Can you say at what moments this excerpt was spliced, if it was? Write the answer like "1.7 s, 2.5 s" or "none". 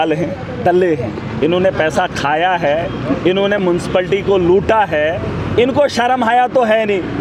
none